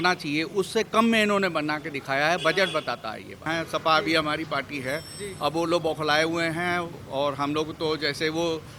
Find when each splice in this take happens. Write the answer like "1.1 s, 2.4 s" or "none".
3.5 s